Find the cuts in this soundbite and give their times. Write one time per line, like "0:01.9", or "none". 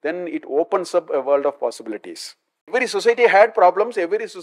0:02.7